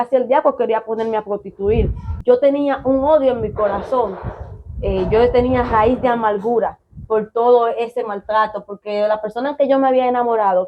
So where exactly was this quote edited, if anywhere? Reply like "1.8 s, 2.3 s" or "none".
2.1 s